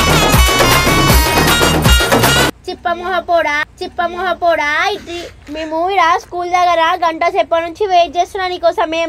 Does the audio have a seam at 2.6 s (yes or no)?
yes